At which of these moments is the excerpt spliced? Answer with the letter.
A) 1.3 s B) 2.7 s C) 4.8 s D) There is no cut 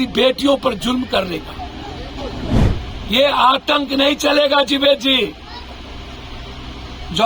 B